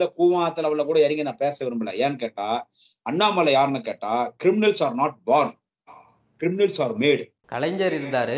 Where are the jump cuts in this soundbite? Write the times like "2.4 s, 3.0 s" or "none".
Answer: 7.4 s